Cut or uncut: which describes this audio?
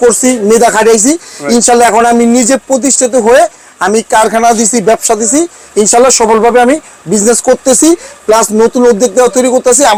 uncut